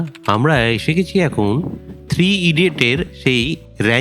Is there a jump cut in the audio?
no; 0 cuts

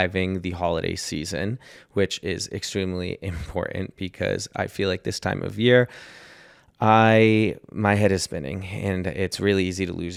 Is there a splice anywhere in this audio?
no; 0 cuts

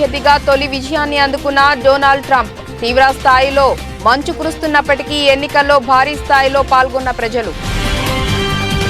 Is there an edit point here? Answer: yes; 1 cut; at 7.6 s

